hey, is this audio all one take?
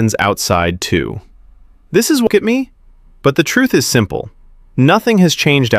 no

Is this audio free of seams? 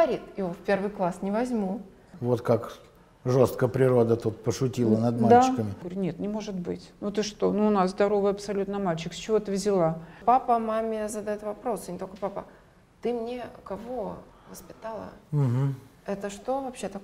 no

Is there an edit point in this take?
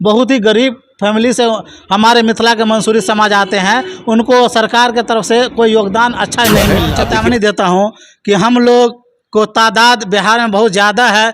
yes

